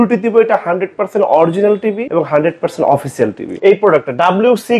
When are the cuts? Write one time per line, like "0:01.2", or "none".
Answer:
0:02.0
0:03.5